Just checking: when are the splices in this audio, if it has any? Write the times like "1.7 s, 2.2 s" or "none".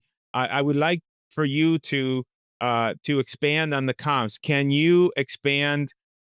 4.3 s